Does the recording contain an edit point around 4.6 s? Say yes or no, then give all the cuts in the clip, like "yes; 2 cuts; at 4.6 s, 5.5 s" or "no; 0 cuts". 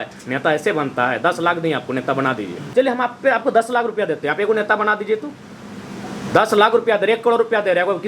no; 1 cut; at 2.6 s